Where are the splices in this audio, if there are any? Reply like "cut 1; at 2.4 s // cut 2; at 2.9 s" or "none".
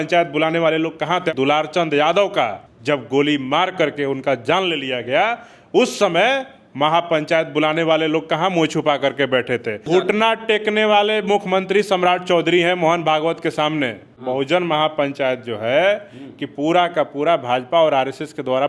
cut 1; at 1.3 s // cut 2; at 2.7 s // cut 3; at 9.8 s // cut 4; at 14.1 s